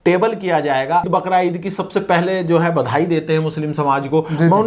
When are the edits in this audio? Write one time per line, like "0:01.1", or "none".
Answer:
0:01.1